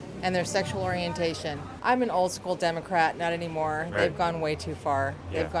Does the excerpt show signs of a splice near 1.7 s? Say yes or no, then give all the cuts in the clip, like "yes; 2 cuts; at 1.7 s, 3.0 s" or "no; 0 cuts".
yes; 1 cut; at 1.7 s